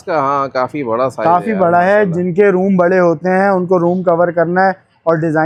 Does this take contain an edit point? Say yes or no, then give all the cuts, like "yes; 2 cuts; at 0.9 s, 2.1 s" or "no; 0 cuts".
no; 0 cuts